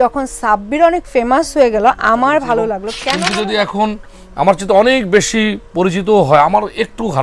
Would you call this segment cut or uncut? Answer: cut